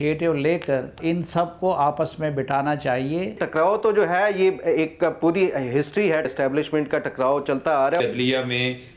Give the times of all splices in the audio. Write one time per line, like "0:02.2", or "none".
0:01.0
0:03.4
0:06.3
0:08.0